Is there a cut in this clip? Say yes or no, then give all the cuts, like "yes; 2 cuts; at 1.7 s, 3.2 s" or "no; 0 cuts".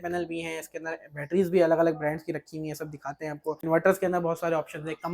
yes; 1 cut; at 3.6 s